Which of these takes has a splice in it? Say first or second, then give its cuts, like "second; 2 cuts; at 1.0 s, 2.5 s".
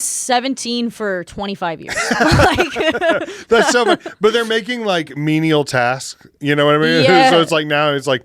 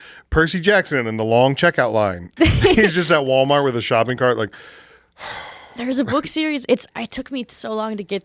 second; 1 cut; at 2.2 s